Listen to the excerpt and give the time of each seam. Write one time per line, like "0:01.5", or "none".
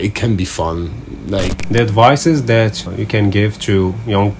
0:01.6
0:02.9